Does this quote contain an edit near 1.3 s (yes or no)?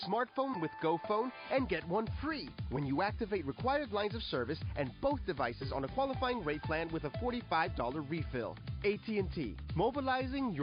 yes